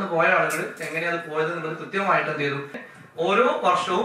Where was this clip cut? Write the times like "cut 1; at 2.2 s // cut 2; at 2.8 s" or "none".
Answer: cut 1; at 2.9 s